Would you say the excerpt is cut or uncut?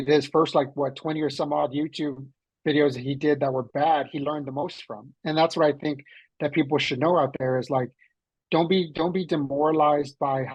uncut